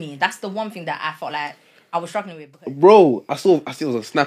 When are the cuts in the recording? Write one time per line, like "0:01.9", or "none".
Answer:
0:02.6